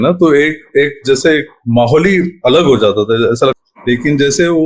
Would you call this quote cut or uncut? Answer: cut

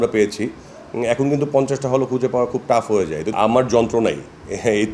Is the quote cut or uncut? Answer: cut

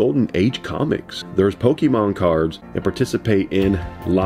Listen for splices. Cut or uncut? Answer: cut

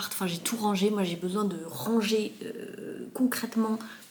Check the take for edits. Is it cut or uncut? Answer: uncut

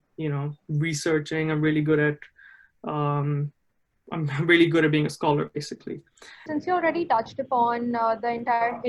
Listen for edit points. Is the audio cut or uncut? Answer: cut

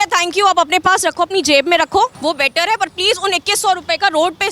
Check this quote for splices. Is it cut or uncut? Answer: cut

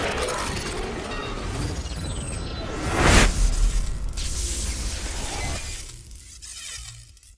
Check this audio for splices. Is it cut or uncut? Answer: cut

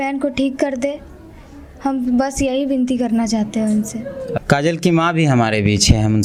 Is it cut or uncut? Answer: uncut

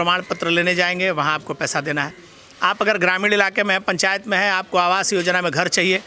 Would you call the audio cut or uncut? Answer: uncut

